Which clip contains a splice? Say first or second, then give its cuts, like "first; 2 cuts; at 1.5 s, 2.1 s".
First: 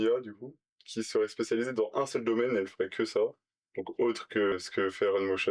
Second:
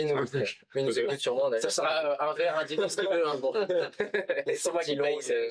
first; 1 cut; at 4.5 s